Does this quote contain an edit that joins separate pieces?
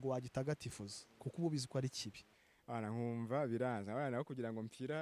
yes; 1 cut; at 2.4 s

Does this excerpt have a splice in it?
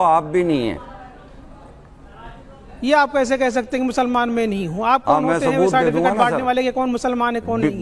no; 0 cuts

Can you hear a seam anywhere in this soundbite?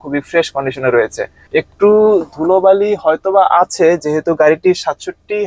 no; 0 cuts

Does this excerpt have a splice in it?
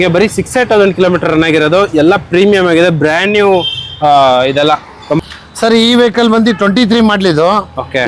yes; 1 cut; at 5.2 s

